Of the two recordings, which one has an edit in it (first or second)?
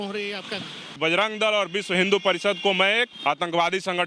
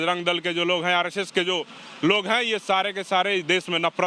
first